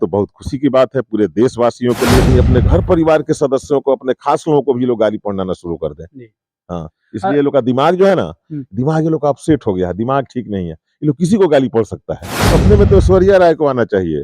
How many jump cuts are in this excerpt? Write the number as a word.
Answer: two